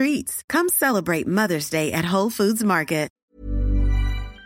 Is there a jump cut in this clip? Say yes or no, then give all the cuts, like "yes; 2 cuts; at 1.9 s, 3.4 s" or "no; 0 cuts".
yes; 1 cut; at 3.1 s